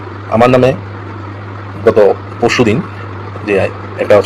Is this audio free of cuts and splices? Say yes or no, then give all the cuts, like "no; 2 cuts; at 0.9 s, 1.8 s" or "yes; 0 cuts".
yes; 0 cuts